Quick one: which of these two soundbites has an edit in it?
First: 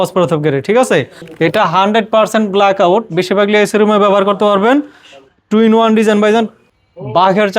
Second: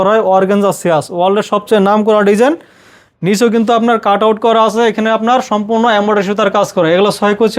first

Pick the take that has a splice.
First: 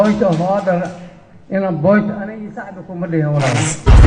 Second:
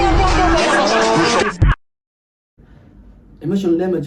second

